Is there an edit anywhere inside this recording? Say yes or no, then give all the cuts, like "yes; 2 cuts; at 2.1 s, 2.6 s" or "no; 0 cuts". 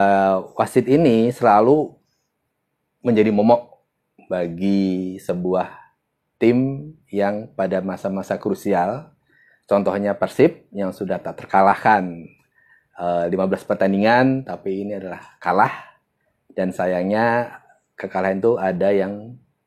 no; 0 cuts